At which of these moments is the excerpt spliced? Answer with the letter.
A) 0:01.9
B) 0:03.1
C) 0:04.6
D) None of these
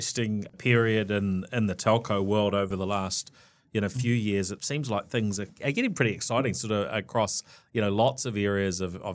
C